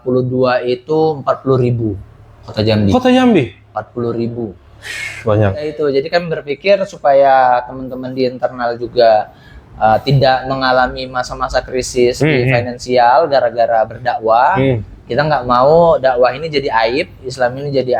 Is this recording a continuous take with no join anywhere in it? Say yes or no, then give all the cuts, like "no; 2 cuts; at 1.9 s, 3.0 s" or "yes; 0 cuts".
no; 1 cut; at 5.9 s